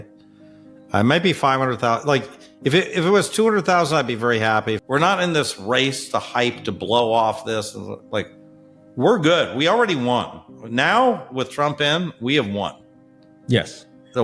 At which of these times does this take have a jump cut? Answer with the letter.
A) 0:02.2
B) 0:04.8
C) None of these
B